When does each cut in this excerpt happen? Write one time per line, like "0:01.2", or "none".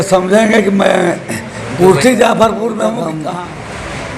0:03.2